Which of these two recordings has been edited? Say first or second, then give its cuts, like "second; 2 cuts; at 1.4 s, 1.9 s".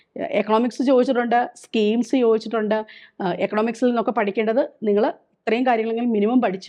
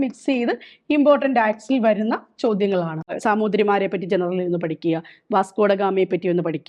second; 1 cut; at 3.1 s